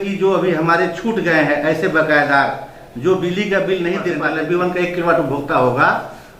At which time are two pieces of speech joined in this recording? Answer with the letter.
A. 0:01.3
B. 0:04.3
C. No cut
B